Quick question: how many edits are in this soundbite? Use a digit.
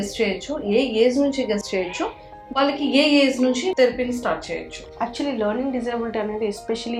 0